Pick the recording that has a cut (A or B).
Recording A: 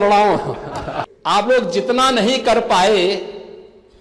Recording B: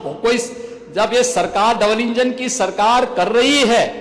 A